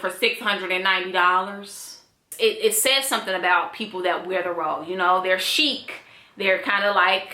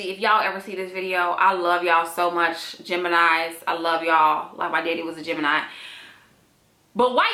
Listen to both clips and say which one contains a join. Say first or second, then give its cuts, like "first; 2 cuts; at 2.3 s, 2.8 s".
first; 1 cut; at 2.4 s